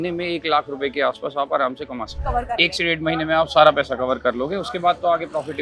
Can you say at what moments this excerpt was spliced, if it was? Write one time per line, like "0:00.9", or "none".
0:02.2